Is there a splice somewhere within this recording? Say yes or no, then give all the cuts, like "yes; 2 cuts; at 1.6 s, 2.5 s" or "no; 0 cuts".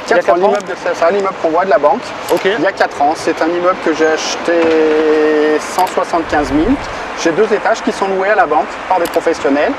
no; 0 cuts